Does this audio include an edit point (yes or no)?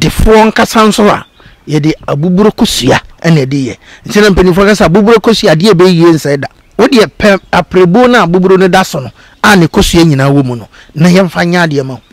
yes